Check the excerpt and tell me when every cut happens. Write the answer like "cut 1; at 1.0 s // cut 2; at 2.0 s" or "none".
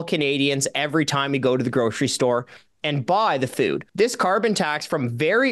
cut 1; at 3.9 s